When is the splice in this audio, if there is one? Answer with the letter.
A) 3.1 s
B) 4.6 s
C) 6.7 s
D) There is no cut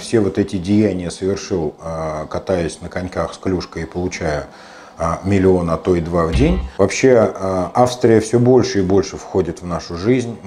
C